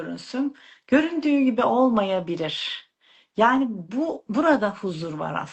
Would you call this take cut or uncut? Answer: uncut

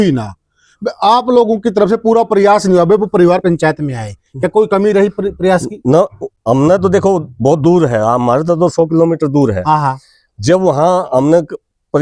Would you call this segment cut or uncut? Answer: uncut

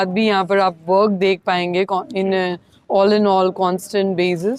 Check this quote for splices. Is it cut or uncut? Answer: uncut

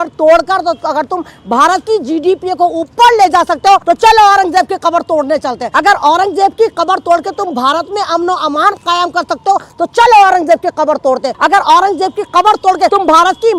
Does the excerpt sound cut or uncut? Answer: cut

